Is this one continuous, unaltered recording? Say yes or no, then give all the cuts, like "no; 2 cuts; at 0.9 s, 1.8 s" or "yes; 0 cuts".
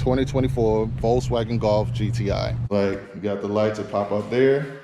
no; 1 cut; at 2.6 s